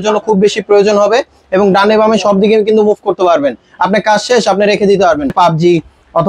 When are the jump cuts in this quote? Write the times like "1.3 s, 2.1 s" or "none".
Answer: 5.3 s